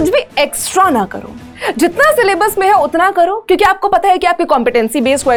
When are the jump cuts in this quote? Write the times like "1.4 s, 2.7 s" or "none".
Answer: none